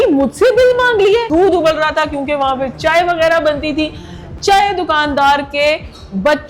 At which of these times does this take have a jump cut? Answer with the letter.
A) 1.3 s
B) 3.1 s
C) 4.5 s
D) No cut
A